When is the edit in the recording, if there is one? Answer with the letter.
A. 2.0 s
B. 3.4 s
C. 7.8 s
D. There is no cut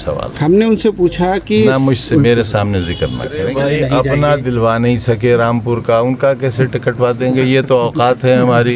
B